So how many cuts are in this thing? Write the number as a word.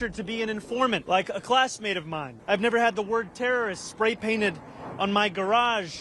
two